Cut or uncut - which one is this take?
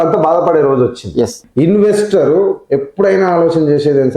cut